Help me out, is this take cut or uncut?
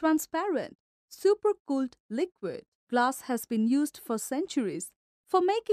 cut